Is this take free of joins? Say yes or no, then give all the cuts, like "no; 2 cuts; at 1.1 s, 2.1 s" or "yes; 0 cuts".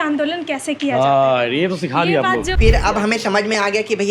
no; 1 cut; at 2.5 s